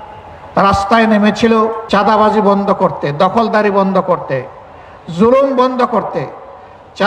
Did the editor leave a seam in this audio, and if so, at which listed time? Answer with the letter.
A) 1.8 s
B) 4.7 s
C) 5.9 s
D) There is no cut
A